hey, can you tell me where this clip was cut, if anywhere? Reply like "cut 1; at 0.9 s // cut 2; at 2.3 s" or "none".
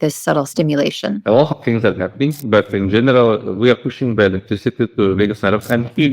cut 1; at 1.2 s